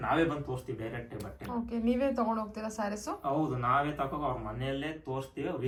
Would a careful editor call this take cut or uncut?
uncut